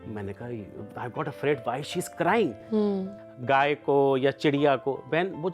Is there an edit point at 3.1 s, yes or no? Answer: yes